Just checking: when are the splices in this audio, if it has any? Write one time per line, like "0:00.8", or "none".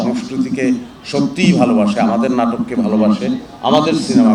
none